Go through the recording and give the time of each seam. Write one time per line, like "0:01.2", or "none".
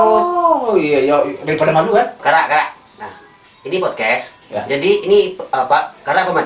0:02.2